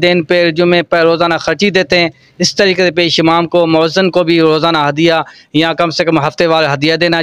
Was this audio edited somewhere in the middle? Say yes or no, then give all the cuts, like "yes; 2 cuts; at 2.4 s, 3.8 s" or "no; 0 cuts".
no; 0 cuts